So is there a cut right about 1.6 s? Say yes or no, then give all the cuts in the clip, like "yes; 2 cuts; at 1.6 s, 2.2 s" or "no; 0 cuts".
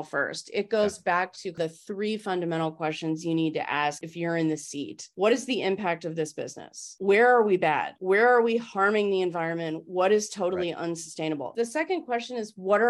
yes; 6 cuts; at 1.6 s, 4.0 s, 5.0 s, 6.9 s, 7.9 s, 11.5 s